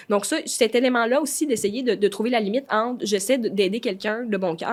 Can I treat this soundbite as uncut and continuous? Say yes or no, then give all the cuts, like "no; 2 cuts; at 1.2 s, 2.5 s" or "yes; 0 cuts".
yes; 0 cuts